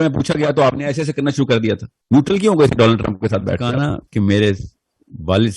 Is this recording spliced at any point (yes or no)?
yes